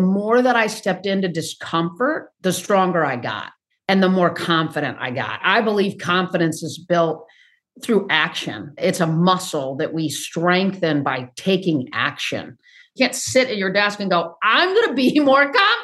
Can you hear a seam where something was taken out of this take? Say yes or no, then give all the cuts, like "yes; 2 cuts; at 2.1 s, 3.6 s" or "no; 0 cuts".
yes; 2 cuts; at 2.3 s, 12.9 s